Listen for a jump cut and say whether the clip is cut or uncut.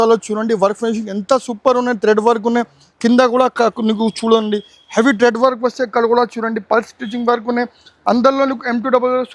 uncut